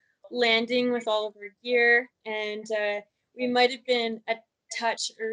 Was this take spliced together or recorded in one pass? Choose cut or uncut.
uncut